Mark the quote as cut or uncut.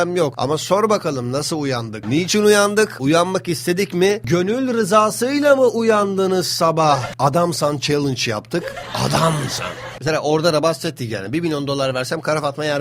cut